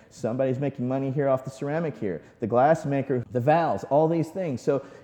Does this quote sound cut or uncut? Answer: cut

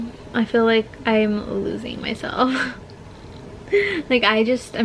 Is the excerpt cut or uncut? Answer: uncut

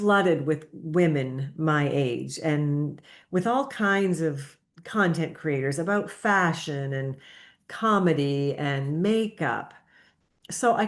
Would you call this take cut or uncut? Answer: uncut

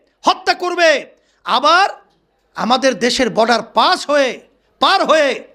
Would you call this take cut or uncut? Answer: uncut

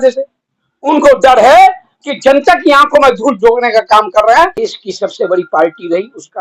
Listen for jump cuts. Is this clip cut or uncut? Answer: cut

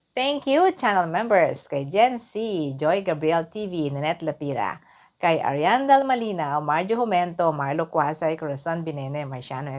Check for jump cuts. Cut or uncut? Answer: uncut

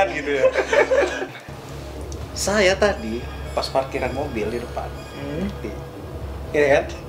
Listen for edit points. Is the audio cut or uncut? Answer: cut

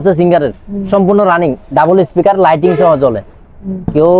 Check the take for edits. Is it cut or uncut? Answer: uncut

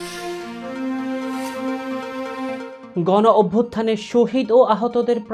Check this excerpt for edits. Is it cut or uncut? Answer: cut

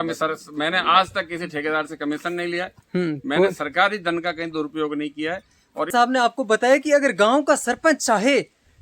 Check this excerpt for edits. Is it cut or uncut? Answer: cut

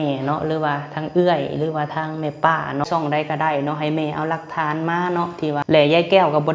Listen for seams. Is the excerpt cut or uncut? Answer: cut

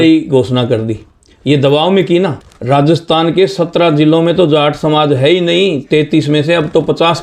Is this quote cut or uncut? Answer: cut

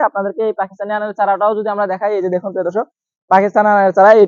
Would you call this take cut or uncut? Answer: uncut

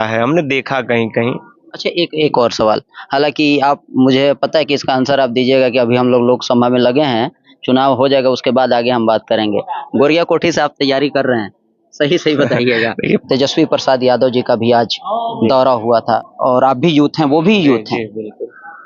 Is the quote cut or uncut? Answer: cut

